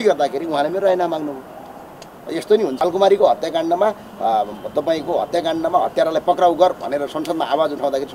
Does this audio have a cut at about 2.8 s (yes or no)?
yes